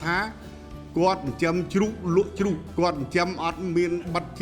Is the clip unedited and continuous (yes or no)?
no